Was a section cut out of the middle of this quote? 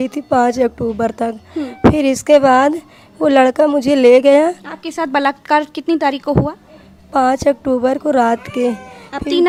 no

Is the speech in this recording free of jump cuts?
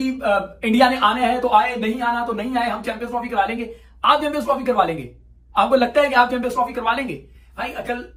yes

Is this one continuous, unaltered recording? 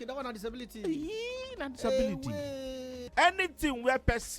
no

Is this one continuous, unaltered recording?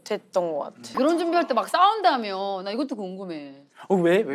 no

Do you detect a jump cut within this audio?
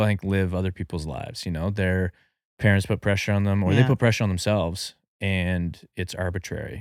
no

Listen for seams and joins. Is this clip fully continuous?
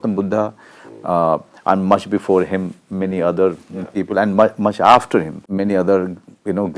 no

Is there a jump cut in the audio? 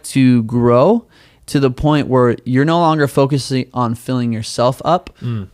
no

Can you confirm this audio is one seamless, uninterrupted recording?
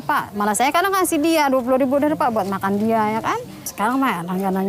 no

